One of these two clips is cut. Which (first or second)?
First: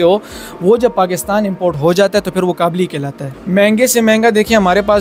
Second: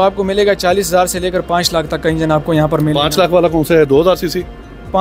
first